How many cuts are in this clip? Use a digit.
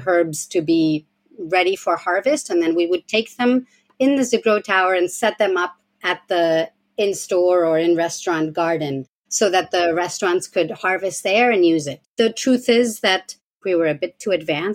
2